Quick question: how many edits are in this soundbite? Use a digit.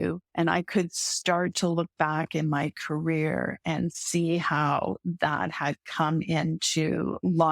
0